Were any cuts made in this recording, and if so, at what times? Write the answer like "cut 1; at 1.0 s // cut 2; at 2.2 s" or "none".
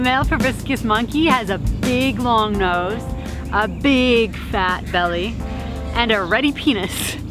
none